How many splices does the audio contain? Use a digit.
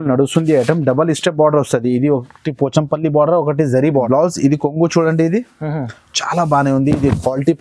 1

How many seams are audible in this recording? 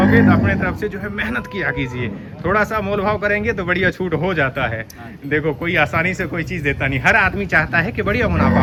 0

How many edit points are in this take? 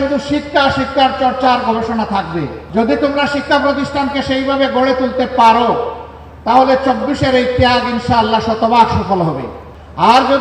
1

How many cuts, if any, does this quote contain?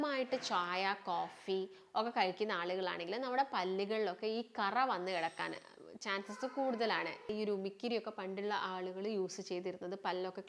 1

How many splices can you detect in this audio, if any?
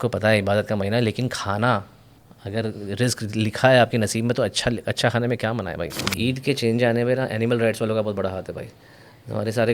1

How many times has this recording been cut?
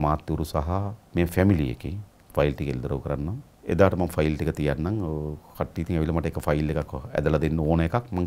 2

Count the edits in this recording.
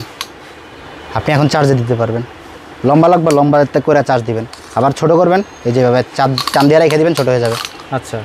0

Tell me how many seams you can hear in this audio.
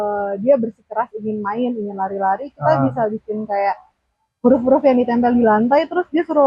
0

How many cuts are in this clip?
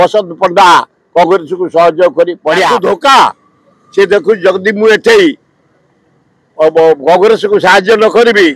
1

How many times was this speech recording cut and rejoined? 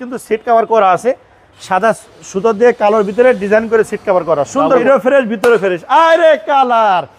1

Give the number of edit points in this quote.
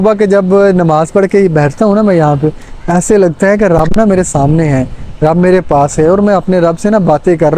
0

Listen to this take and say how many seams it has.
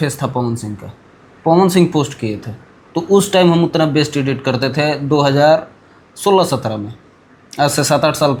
0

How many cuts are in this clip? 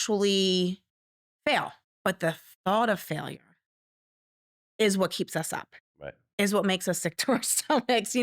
1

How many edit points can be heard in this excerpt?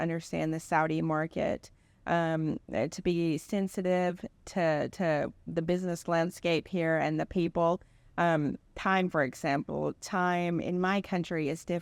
0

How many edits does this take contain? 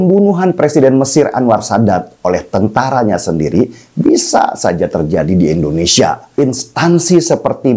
1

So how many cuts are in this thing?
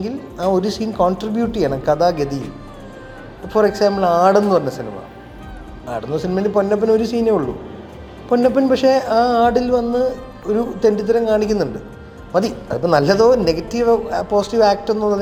0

